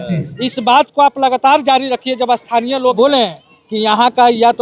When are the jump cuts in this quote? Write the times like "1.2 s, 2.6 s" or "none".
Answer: 2.9 s